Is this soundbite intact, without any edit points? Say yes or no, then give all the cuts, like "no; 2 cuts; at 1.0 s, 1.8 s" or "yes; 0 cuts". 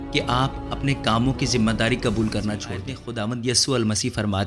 no; 1 cut; at 3.0 s